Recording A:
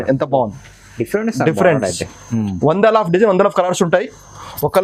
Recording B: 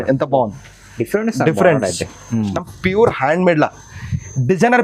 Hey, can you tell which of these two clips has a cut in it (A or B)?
B